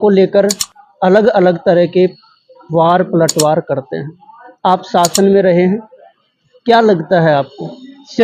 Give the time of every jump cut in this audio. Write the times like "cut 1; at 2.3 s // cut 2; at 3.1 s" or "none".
none